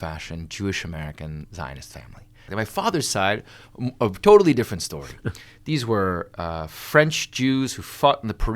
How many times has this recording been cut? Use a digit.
1